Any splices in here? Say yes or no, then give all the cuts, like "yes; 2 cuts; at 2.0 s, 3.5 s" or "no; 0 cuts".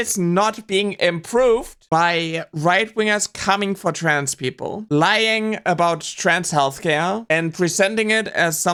no; 0 cuts